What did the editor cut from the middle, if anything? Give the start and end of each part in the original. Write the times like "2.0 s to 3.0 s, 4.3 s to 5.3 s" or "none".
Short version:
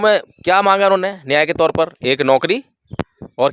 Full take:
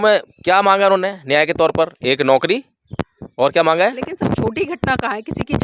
none